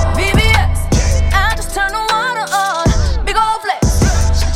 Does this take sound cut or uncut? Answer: uncut